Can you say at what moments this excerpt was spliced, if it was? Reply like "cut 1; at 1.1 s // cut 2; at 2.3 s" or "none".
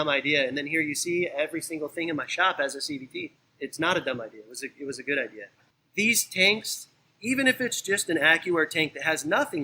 cut 1; at 3.4 s // cut 2; at 5.4 s